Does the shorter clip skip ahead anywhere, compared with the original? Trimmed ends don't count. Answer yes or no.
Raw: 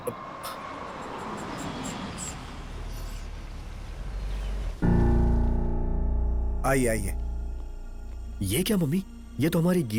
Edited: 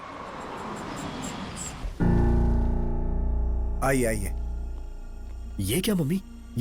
yes